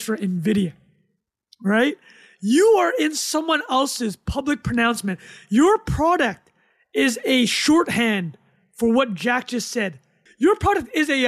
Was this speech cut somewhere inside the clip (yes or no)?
yes